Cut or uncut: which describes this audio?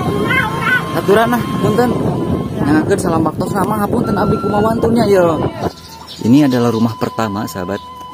cut